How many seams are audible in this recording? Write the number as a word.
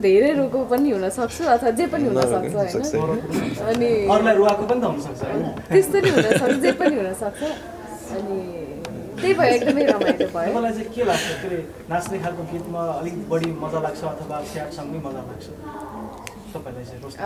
zero